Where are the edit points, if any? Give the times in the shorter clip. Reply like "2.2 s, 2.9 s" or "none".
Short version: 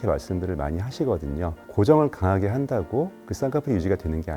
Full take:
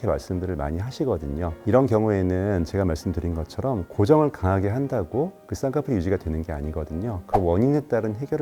1.6 s